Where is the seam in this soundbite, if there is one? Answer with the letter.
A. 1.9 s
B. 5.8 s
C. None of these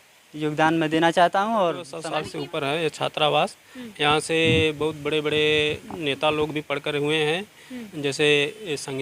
A